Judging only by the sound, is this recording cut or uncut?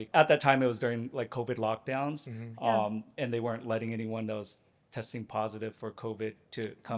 uncut